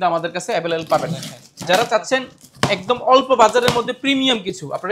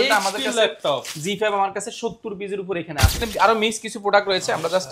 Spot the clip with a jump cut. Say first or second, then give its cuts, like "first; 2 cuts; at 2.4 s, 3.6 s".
second; 1 cut; at 3.2 s